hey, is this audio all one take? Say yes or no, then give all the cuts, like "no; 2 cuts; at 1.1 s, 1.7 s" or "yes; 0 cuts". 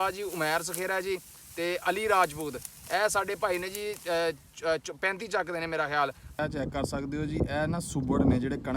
no; 1 cut; at 6.4 s